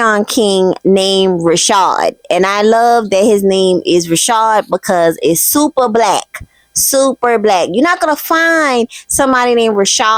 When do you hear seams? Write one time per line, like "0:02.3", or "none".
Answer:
none